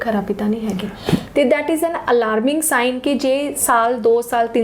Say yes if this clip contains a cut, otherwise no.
no